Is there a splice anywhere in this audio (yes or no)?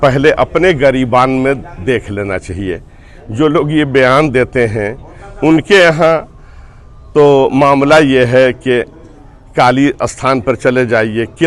no